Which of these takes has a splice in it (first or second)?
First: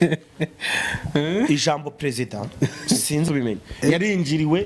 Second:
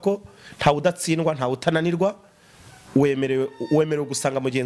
first